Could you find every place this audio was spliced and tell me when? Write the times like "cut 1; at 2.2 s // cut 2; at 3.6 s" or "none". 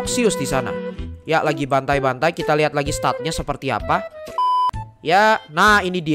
cut 1; at 4.6 s